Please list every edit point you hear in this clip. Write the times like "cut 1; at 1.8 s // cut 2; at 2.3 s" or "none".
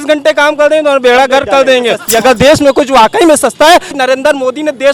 cut 1; at 2.0 s // cut 2; at 4.0 s